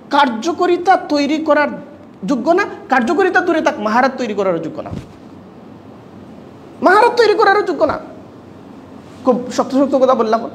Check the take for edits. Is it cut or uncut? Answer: uncut